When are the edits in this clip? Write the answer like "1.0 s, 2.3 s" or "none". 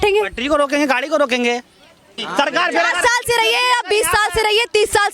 2.2 s